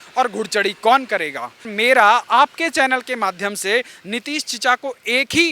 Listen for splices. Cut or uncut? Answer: cut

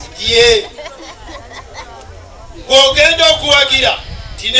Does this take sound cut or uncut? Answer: uncut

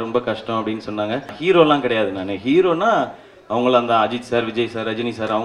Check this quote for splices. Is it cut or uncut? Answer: cut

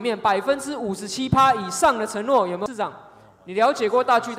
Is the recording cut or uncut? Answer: cut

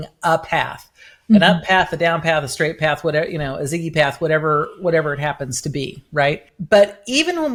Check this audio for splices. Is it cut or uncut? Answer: uncut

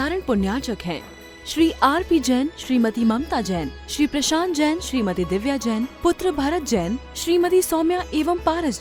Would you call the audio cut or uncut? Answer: uncut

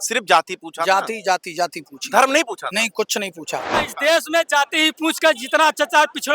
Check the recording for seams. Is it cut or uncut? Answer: cut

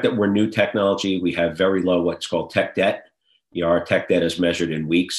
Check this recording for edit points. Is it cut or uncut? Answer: uncut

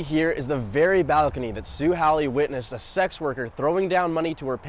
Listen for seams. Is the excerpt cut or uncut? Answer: uncut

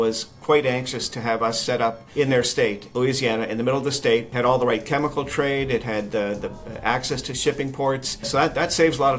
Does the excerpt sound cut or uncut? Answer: cut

